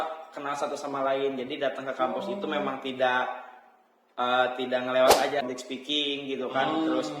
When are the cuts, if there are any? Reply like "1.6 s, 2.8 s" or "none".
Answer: 5.4 s